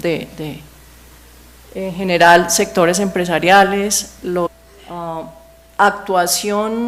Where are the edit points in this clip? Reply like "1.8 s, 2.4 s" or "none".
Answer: none